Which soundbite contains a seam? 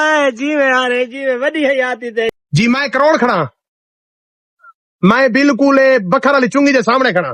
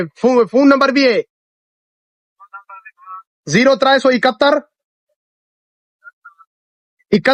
first; 1 cut; at 2.3 s

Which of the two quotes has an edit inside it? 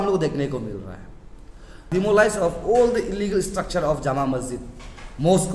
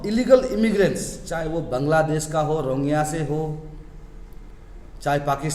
first; 1 cut; at 1.9 s

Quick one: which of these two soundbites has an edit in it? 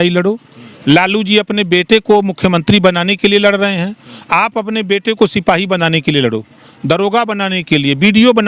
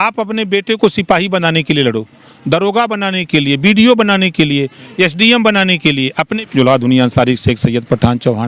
second; 1 cut; at 6.4 s

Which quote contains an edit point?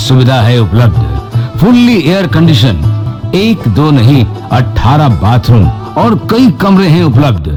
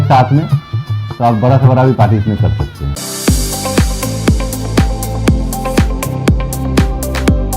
second; 1 cut; at 2.9 s

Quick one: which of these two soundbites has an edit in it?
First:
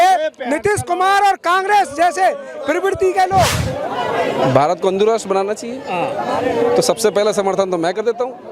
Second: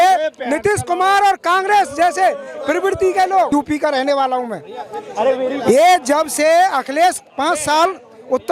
first; 1 cut; at 3.5 s

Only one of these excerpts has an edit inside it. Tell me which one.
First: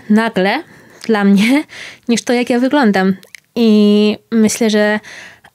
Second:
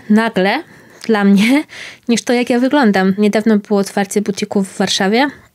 second; 1 cut; at 3.2 s

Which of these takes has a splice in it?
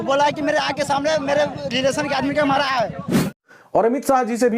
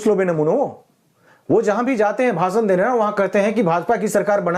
first; 1 cut; at 3.4 s

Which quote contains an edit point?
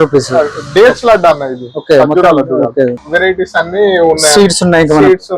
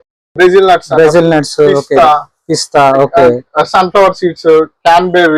first; 1 cut; at 3.0 s

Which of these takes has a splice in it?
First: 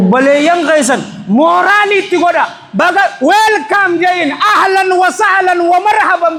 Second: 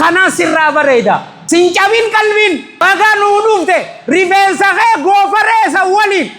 second; 2 cuts; at 1.3 s, 2.8 s

